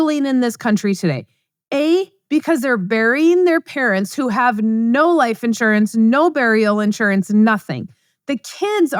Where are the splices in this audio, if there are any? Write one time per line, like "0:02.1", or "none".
none